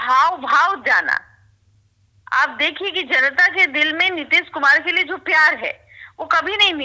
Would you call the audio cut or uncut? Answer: uncut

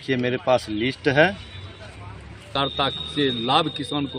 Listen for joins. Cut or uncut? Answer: cut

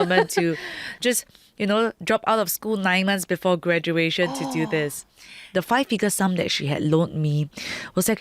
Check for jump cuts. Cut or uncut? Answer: cut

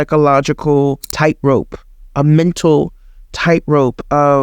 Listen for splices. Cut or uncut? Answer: cut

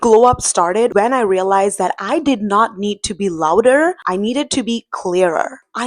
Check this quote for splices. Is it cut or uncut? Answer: cut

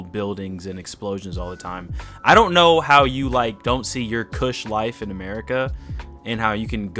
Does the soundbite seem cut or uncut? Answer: uncut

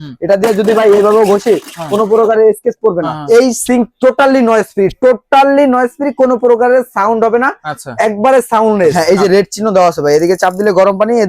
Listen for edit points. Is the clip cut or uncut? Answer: cut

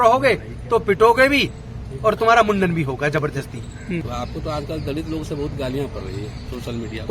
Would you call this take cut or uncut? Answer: cut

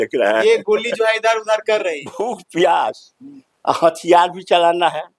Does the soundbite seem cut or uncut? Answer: cut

